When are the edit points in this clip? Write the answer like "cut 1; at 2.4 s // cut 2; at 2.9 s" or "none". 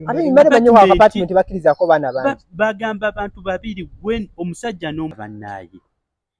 cut 1; at 5.1 s